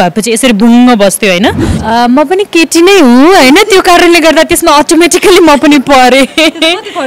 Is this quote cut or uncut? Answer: cut